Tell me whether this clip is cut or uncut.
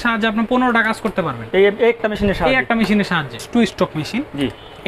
cut